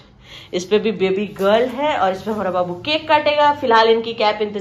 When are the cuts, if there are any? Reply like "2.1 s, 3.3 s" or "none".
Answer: none

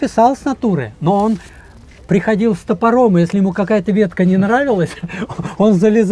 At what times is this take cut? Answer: none

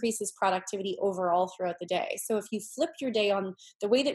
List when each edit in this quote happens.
none

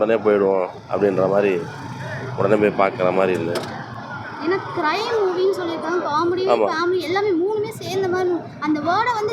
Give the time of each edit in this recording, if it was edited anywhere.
none

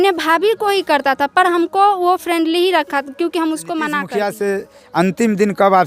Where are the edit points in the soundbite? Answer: 4.0 s

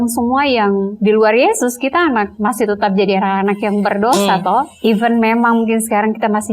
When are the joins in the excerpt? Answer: 0.9 s, 2.3 s, 4.7 s

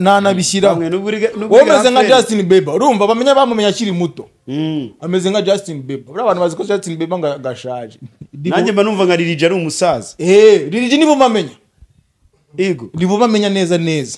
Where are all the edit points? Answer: none

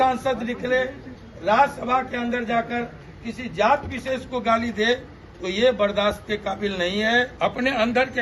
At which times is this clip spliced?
7.3 s

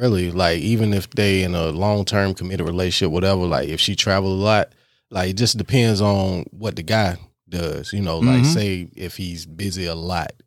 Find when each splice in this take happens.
none

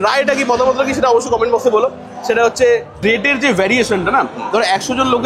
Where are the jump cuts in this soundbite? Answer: 3.0 s

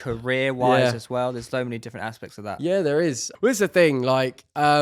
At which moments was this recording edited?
3.2 s

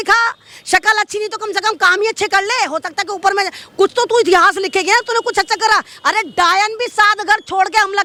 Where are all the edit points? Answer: none

